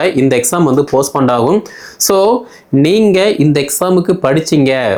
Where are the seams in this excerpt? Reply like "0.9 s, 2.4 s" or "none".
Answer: none